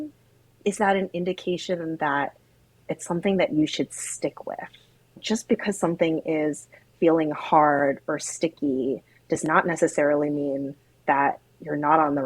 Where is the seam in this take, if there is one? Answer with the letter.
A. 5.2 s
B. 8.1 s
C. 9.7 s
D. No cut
A